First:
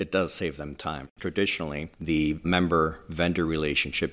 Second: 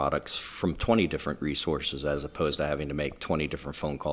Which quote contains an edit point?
first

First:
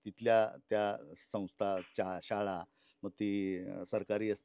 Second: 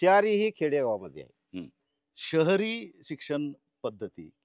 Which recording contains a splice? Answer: second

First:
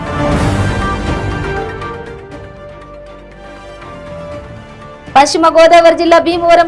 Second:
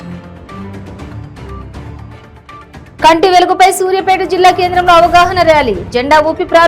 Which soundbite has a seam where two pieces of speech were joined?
second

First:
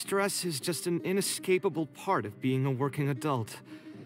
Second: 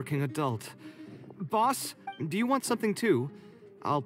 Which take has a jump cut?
second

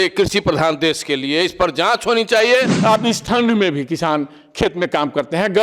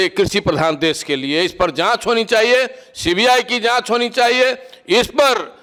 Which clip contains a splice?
first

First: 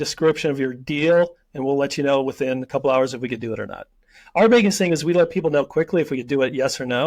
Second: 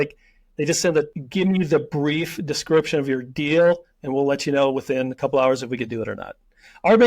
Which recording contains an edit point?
second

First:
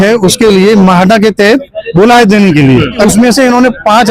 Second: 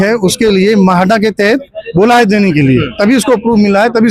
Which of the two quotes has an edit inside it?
first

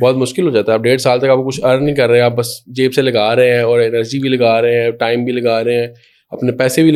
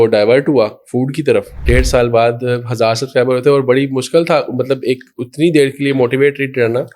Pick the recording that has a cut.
second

